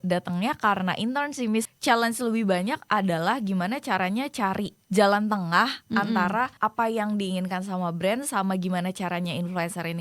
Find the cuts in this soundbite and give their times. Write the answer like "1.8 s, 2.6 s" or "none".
1.7 s, 4.8 s, 6.5 s